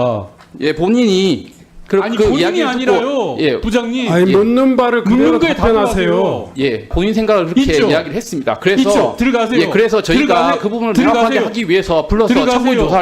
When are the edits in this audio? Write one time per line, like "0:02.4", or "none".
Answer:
0:06.9